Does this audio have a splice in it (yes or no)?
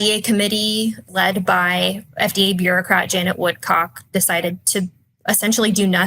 yes